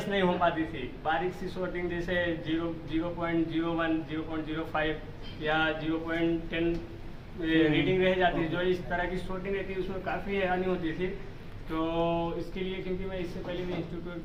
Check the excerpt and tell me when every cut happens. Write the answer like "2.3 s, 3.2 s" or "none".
none

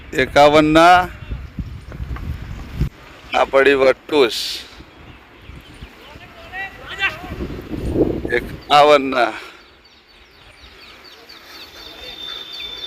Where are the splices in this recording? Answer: none

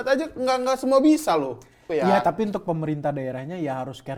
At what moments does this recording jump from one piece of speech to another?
1.8 s

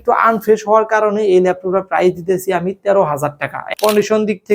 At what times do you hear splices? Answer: 3.6 s

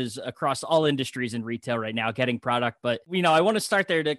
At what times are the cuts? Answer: 3.1 s

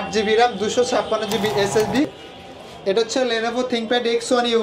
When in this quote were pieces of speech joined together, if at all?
2.2 s

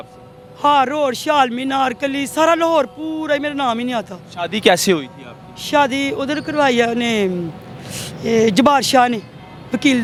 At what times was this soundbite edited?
none

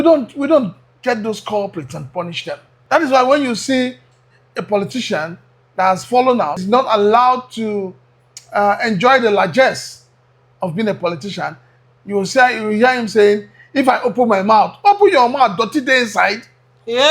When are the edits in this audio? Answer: 2.7 s, 6.6 s

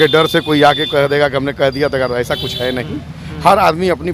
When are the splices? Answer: none

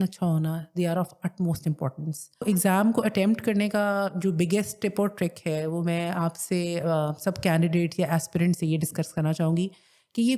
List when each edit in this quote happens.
2.4 s

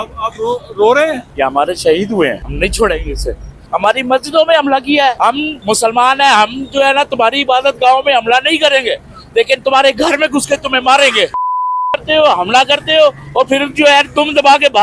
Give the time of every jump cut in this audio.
1.2 s, 2.5 s, 3.6 s, 5.3 s, 11.3 s

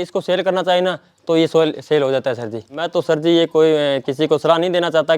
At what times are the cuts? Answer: 2.8 s

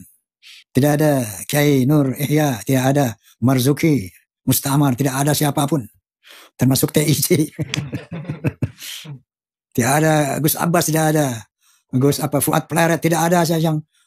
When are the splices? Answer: none

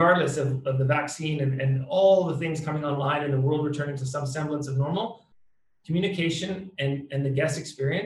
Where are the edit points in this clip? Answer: none

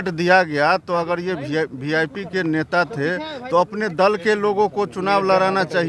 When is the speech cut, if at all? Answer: none

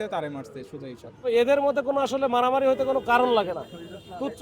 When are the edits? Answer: 1.3 s

